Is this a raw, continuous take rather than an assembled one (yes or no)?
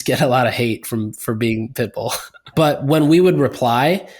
no